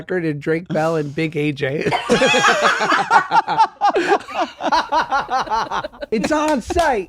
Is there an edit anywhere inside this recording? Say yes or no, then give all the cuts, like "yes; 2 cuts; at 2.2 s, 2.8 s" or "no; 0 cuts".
yes; 1 cut; at 5.9 s